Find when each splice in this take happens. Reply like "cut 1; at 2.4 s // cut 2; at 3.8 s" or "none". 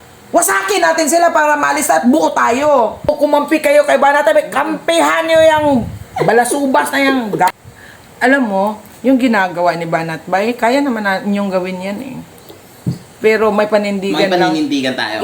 cut 1; at 3.1 s // cut 2; at 7.7 s